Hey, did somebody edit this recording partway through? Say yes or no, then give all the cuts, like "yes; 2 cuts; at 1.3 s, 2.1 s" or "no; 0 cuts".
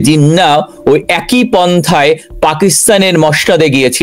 no; 0 cuts